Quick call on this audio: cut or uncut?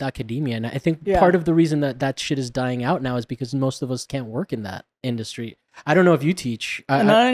cut